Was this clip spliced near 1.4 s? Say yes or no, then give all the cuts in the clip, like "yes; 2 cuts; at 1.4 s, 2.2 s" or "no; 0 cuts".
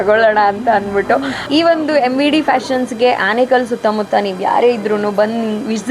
yes; 1 cut; at 1.4 s